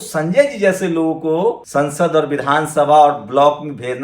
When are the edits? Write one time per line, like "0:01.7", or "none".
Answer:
0:01.6